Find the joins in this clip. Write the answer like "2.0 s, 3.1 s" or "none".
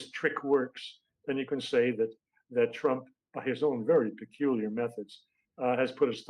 none